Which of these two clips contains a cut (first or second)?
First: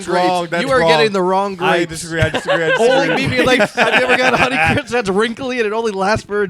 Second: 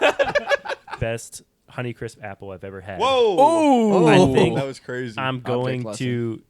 second